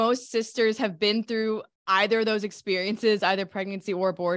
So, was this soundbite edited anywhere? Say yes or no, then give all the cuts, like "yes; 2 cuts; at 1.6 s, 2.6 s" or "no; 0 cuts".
yes; 1 cut; at 1.7 s